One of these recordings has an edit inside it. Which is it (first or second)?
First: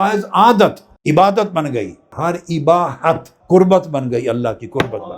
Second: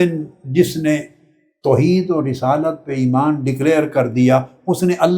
first